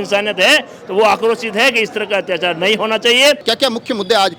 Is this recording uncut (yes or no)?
no